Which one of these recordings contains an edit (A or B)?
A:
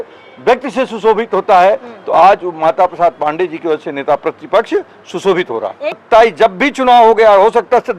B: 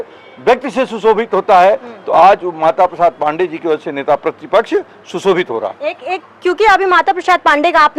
A